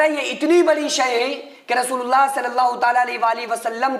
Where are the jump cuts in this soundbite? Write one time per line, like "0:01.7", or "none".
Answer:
none